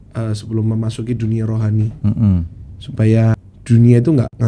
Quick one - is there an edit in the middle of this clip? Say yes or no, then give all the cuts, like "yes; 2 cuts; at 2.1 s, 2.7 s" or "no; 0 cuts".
yes; 1 cut; at 3.5 s